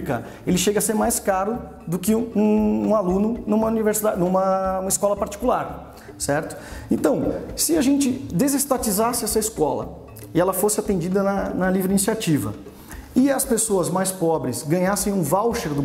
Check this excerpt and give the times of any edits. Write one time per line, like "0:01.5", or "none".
none